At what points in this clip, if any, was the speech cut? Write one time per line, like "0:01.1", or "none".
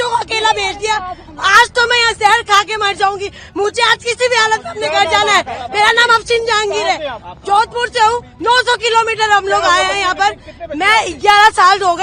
none